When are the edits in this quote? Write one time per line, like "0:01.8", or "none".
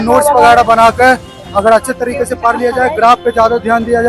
none